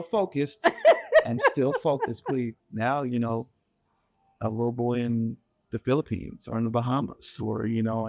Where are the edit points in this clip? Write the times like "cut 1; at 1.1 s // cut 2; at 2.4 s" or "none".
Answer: cut 1; at 2.6 s